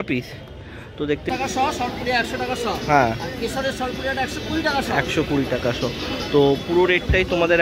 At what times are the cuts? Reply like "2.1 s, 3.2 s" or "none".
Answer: 1.3 s